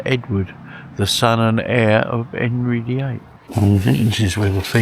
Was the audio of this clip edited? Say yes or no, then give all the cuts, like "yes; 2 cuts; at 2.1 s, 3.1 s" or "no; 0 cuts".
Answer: yes; 1 cut; at 3.3 s